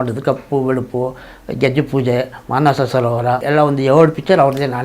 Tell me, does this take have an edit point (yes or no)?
yes